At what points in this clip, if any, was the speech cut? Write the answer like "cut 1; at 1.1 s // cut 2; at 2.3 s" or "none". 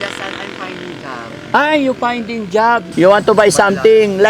cut 1; at 2.9 s